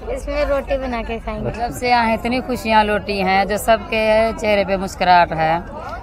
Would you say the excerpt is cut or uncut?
cut